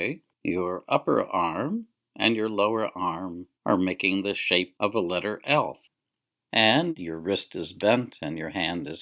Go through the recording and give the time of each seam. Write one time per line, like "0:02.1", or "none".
none